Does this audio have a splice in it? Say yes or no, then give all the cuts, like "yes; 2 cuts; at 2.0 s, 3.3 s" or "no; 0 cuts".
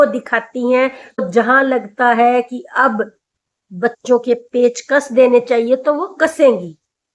yes; 1 cut; at 1.2 s